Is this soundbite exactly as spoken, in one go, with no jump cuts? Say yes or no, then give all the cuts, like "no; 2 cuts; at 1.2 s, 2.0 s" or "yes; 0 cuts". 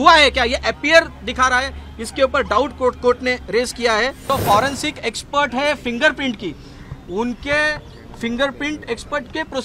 no; 1 cut; at 4.2 s